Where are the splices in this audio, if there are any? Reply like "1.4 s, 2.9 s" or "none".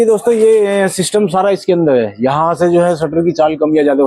none